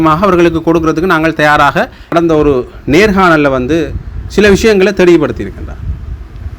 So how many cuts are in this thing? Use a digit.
1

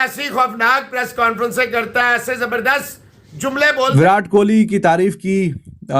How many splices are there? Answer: 1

